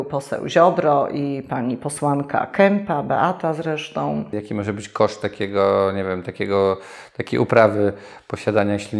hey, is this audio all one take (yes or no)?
no